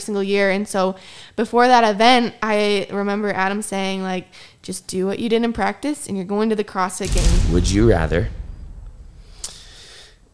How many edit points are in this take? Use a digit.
1